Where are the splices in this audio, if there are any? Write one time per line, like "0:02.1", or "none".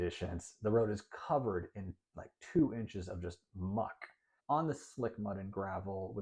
0:04.3

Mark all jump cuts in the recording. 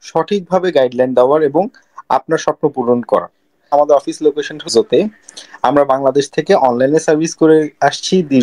0:03.7

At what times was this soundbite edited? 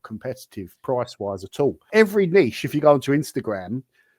0:01.9

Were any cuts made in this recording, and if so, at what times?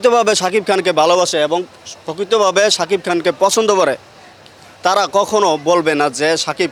none

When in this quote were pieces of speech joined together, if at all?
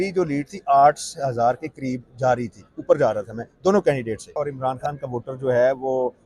0:04.3

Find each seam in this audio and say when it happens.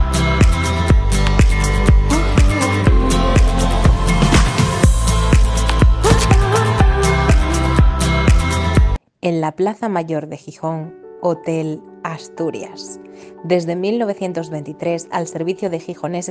0:01.0

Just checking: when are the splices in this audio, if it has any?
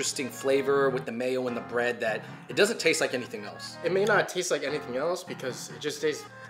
0:03.8

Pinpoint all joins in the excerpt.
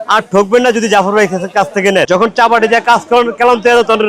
0:02.1

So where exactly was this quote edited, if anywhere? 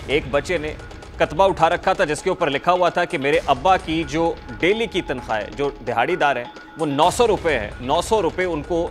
none

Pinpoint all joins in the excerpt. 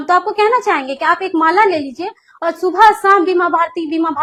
none

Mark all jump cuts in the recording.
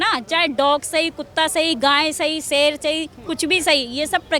none

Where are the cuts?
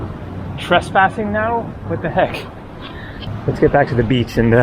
0:03.2

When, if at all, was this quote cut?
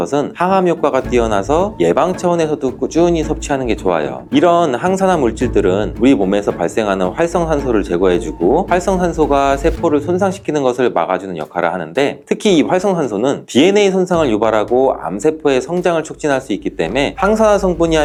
none

